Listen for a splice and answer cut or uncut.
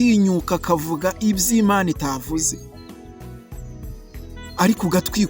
uncut